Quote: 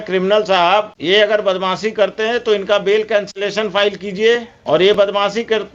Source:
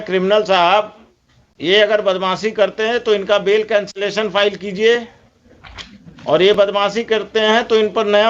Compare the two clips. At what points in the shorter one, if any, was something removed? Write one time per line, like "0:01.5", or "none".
0:00.9
0:04.5